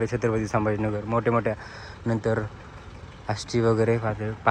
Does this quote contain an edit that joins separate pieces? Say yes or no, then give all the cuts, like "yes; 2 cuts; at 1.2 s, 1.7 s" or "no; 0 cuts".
no; 0 cuts